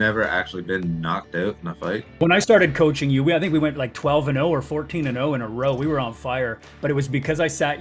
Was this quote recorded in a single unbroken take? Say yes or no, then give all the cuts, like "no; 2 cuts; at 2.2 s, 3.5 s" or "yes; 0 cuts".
no; 1 cut; at 2.2 s